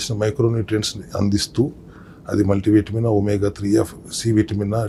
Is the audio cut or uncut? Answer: uncut